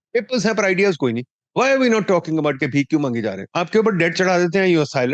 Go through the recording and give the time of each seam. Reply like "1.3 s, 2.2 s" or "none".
1.3 s, 3.4 s